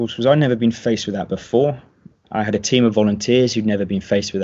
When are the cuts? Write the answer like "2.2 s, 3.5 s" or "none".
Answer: none